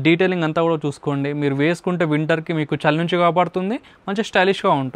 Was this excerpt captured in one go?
yes; 0 cuts

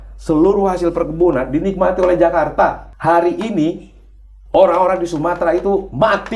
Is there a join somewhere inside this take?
yes; 1 cut; at 2.9 s

